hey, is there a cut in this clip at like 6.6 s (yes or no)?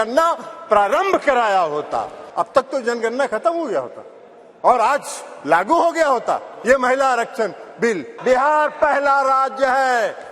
no